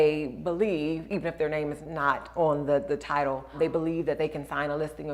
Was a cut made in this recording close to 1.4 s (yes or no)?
no